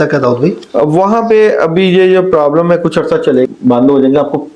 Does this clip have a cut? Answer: yes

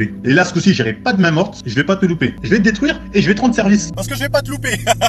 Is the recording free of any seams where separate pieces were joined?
no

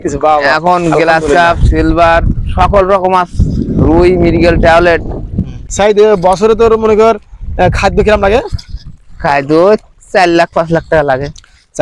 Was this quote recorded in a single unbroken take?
no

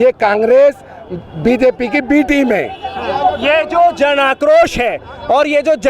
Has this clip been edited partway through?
no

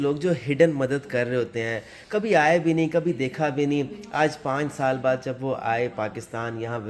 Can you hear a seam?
no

